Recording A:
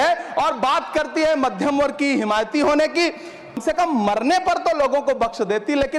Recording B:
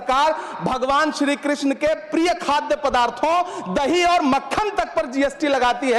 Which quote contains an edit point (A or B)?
A